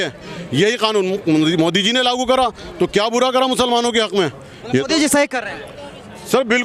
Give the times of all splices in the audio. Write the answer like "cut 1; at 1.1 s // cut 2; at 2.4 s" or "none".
none